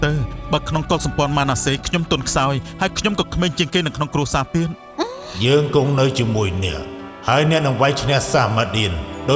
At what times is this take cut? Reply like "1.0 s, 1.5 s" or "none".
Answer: none